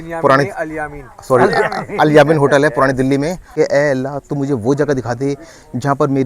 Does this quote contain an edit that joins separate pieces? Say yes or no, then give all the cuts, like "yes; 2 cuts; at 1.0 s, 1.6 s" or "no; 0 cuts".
yes; 1 cut; at 3.4 s